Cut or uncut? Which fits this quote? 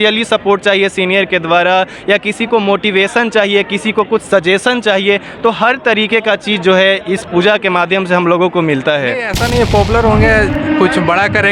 cut